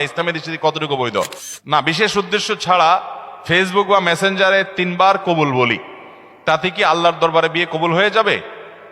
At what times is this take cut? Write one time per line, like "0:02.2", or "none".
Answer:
0:01.5